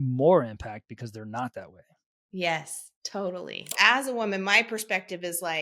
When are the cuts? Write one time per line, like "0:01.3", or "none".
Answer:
0:03.8